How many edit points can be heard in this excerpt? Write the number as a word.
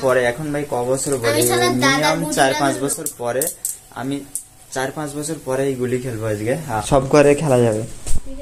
zero